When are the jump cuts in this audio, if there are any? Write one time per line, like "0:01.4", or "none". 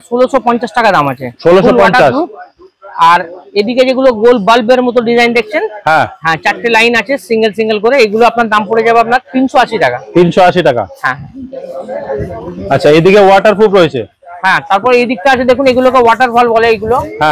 none